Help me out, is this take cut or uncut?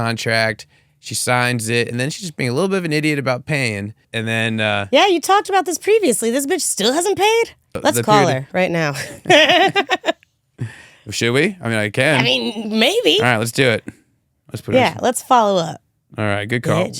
cut